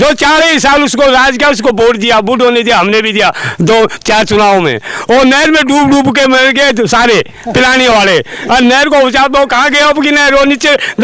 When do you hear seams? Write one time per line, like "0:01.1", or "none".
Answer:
none